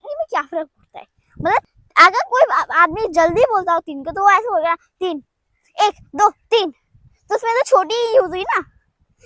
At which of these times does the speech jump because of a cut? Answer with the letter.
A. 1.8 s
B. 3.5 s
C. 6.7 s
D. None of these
A